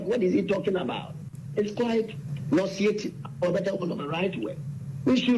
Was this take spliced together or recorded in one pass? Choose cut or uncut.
cut